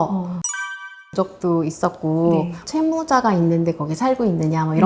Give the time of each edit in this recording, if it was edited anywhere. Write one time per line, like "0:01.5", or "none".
none